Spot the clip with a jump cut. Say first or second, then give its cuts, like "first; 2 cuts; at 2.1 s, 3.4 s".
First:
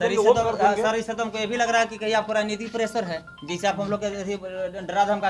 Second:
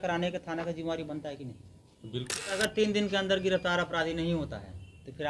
second; 1 cut; at 2.6 s